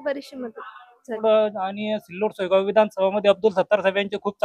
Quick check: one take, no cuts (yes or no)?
no